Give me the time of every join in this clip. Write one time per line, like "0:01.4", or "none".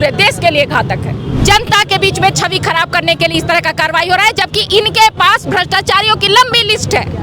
0:01.3